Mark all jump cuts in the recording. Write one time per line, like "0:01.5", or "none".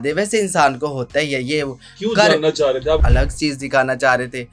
0:03.0